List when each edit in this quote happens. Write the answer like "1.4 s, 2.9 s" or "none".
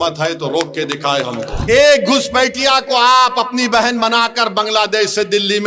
1.5 s